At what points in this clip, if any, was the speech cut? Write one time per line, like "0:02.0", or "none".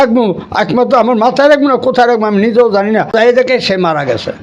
0:03.1